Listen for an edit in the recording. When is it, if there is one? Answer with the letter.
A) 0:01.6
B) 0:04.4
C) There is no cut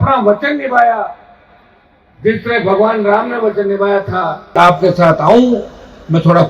B